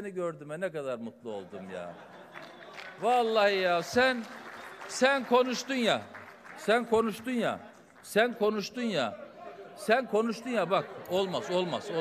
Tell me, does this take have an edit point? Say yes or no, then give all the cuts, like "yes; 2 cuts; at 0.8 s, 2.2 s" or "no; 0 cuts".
no; 0 cuts